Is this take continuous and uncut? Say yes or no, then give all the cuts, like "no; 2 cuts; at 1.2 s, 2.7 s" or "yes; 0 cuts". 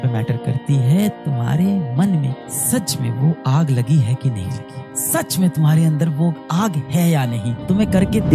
yes; 0 cuts